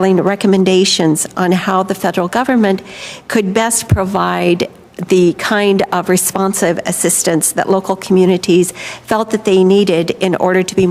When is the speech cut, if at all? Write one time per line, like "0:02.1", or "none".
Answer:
0:03.2